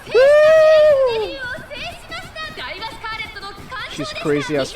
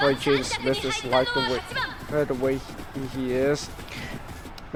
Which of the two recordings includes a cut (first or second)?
first